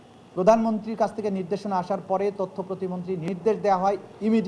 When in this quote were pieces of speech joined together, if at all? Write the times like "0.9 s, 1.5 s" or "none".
3.3 s